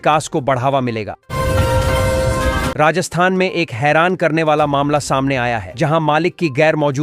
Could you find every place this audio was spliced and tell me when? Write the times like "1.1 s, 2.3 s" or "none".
1.2 s, 2.7 s